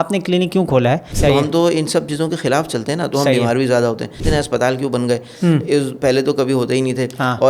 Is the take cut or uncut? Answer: cut